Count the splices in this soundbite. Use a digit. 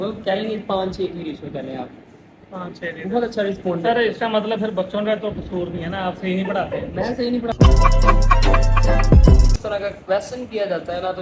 1